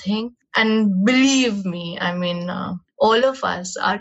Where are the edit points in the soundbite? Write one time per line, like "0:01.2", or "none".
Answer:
0:02.8